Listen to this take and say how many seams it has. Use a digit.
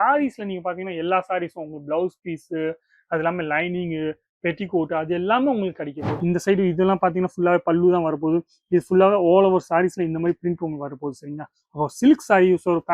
1